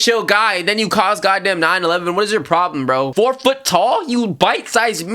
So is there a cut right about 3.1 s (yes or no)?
yes